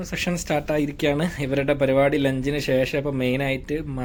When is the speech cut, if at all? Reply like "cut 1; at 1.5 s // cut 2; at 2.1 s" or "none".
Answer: none